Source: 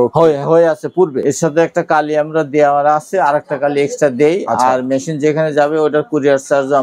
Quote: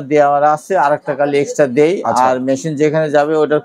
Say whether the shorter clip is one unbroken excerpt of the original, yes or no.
yes